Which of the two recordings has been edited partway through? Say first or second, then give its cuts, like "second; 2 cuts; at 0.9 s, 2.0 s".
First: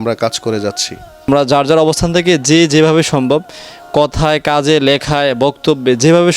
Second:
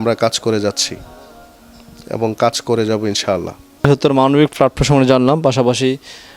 first; 1 cut; at 1.3 s